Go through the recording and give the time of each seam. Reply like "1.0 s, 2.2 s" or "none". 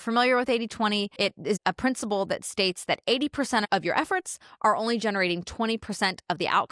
1.5 s, 3.7 s